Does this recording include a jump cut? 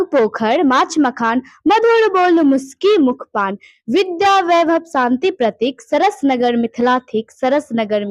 no; 0 cuts

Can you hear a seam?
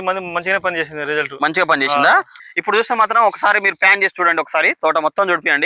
yes; 1 cut; at 2.4 s

